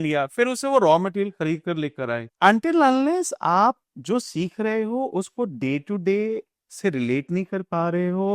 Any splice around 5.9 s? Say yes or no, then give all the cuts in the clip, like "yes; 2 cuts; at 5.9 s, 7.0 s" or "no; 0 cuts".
no; 1 cut; at 2.2 s